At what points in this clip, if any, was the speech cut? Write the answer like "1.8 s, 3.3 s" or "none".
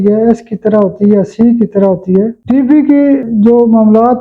2.4 s, 3.3 s